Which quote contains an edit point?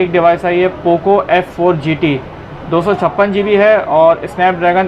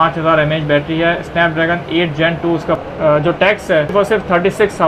second; 2 cuts; at 2.8 s, 3.9 s

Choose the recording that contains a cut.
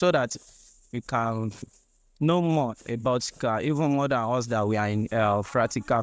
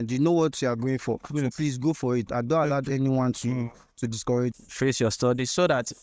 second; 1 cut; at 4.5 s

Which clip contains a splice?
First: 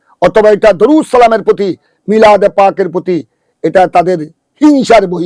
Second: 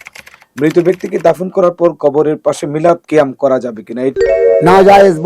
second; 2 cuts; at 3.0 s, 4.1 s

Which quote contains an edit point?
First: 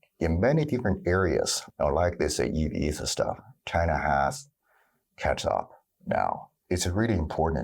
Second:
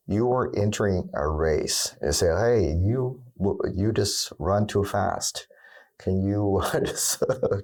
first; 2 cuts; at 1.6 s, 6.5 s

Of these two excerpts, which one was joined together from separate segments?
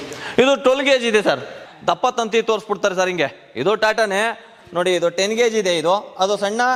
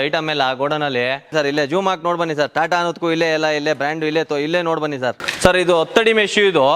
second; 2 cuts; at 1.3 s, 5.2 s

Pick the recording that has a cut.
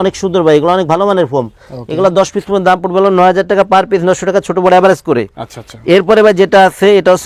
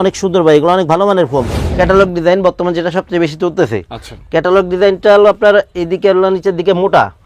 second; 1 cut; at 1.6 s

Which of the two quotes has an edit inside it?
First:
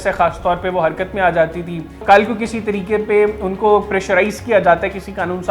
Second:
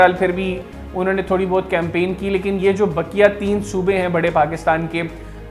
first; 1 cut; at 1.9 s

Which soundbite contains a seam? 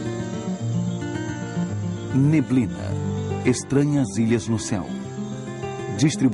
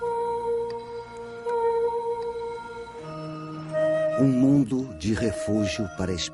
second; 1 cut; at 1.0 s

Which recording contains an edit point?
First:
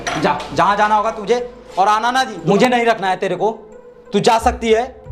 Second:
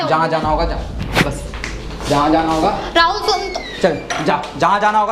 first; 1 cut; at 2.4 s

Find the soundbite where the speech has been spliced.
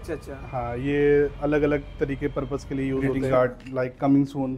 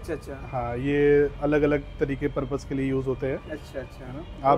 first; 1 cut; at 3.1 s

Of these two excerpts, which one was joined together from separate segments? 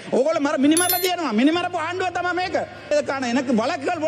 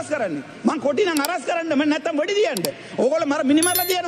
first; 1 cut; at 2.9 s

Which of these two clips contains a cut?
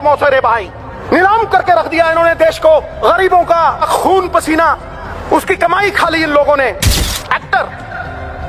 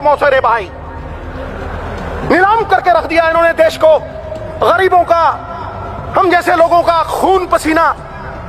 first; 5 cuts; at 0.9 s, 2.9 s, 3.8 s, 5.1 s, 7.0 s

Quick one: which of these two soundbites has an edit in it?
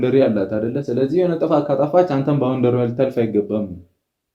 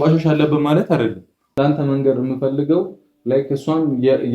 second; 1 cut; at 1.5 s

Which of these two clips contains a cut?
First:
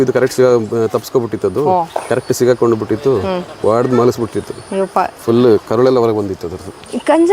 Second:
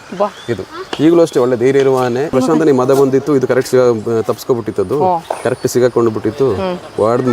second; 1 cut; at 2.3 s

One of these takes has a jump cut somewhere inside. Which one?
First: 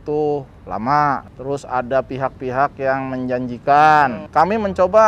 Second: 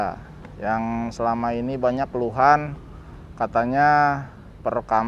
first; 2 cuts; at 1.3 s, 4.2 s

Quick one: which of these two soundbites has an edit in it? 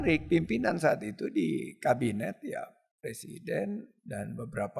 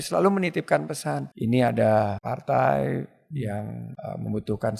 second; 3 cuts; at 1.3 s, 2.3 s, 3.9 s

